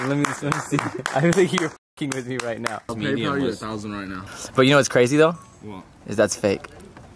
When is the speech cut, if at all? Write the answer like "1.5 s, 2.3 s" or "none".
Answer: 2.9 s, 4.2 s